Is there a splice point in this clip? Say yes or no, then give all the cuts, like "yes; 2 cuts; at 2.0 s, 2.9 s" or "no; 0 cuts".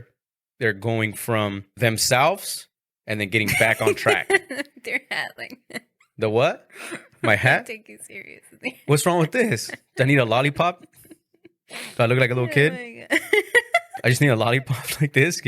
yes; 1 cut; at 1.7 s